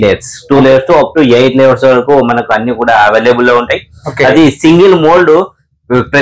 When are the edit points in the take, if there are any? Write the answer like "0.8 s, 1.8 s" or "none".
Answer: none